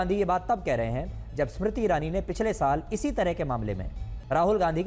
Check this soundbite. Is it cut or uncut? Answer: uncut